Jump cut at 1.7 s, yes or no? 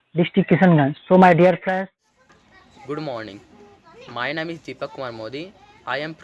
yes